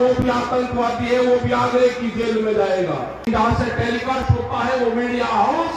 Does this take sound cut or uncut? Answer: cut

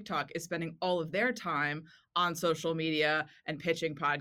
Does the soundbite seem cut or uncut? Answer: uncut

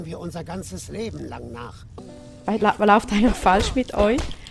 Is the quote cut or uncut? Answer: cut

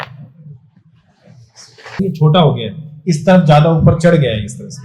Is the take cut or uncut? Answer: cut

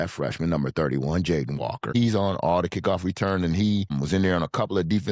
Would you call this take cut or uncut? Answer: cut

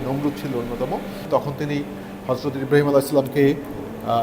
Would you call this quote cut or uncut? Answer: uncut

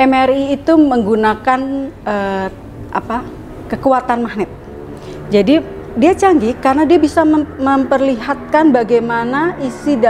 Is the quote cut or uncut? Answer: uncut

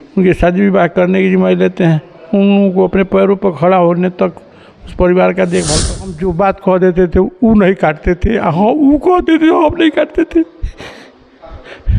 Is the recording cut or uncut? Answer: cut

